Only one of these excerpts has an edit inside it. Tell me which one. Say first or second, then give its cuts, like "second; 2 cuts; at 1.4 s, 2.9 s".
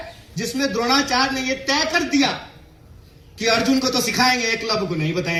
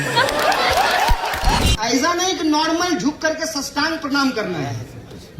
second; 1 cut; at 1.6 s